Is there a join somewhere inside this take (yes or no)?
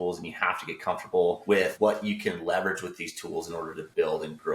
yes